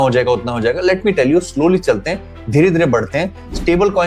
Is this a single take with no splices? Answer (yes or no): yes